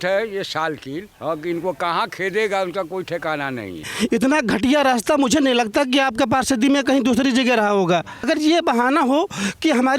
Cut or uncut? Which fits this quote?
cut